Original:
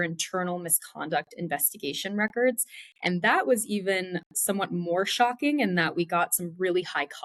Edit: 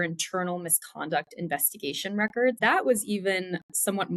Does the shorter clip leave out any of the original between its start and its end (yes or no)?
yes